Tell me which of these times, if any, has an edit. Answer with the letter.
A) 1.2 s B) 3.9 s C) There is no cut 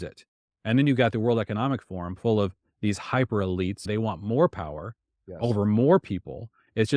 B